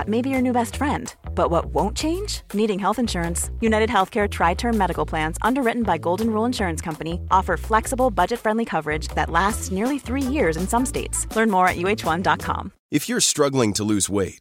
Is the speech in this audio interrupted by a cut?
yes; 1 cut; at 12.7 s

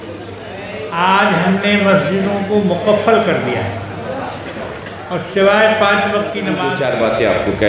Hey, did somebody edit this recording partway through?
yes; 1 cut; at 6.7 s

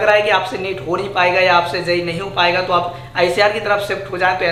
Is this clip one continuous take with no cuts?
yes; 0 cuts

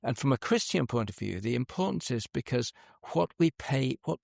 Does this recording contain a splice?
no; 0 cuts

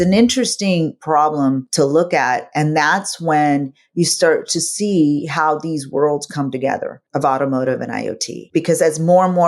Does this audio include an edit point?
yes; 1 cut; at 1.0 s

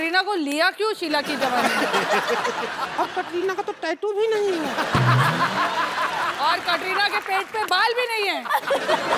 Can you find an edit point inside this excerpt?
no; 0 cuts

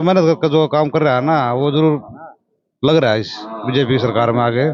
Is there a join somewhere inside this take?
no; 0 cuts

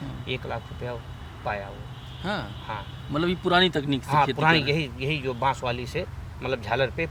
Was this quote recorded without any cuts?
yes; 0 cuts

